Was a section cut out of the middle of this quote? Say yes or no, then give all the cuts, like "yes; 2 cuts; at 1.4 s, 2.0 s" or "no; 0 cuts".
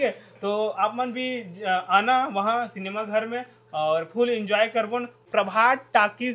yes; 1 cut; at 5.2 s